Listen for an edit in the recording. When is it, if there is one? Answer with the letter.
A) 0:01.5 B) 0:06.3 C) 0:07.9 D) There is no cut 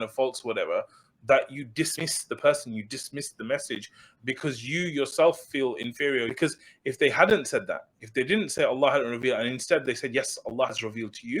B